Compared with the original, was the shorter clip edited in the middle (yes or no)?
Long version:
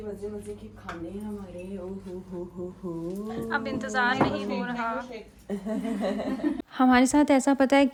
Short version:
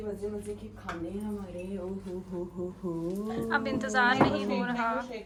no